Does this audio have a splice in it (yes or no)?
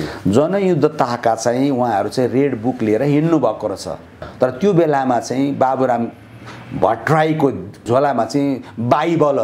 yes